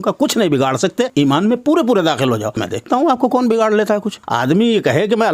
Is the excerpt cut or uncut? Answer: cut